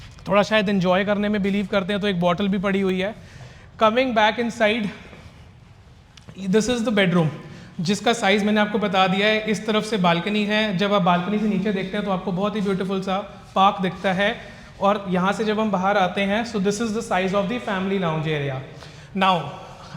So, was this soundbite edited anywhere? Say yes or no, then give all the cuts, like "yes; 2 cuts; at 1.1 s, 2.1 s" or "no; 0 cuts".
no; 0 cuts